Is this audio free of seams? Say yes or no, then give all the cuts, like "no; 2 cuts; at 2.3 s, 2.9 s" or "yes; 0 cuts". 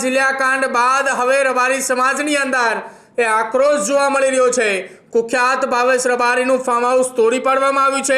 no; 1 cut; at 4.9 s